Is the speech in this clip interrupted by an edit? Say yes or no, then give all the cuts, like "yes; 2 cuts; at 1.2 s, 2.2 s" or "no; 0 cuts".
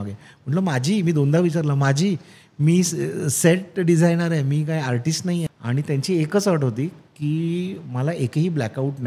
yes; 1 cut; at 5.5 s